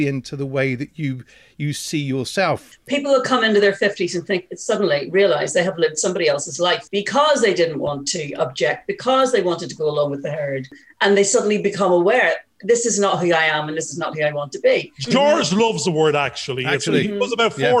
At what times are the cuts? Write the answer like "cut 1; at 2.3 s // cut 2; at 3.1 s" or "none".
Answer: cut 1; at 2.7 s // cut 2; at 6.8 s // cut 3; at 10.8 s // cut 4; at 14.9 s